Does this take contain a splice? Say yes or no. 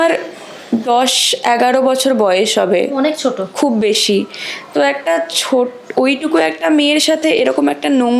no